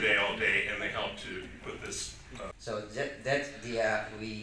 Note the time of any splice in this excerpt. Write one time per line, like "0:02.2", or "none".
0:02.5